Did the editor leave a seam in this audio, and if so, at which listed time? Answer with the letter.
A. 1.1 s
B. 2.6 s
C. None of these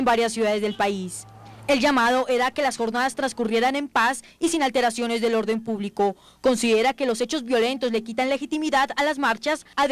A